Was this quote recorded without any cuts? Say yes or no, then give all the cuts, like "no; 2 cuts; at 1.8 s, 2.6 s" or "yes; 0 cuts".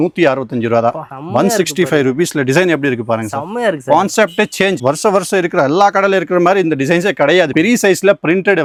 yes; 0 cuts